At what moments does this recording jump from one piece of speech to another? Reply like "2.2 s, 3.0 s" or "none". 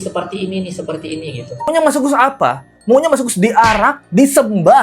1.7 s